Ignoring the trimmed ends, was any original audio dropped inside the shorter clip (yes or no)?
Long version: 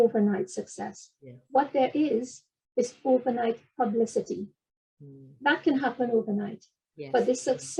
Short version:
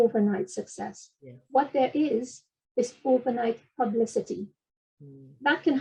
no